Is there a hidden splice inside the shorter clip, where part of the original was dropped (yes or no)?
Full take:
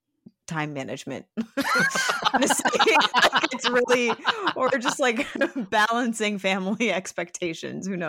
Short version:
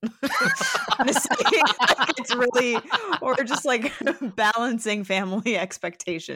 no